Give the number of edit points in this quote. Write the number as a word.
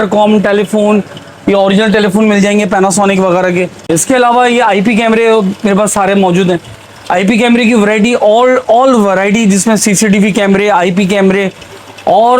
one